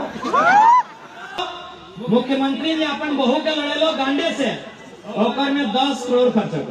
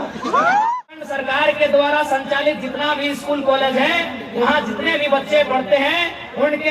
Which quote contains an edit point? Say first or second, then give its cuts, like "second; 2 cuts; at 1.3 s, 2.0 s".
second; 1 cut; at 1.1 s